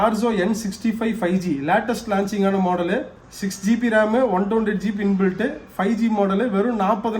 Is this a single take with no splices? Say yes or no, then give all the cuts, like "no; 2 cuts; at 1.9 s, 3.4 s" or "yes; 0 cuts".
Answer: yes; 0 cuts